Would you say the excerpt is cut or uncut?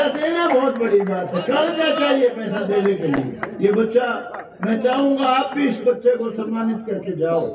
uncut